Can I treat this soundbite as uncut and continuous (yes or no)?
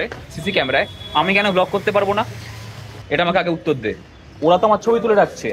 yes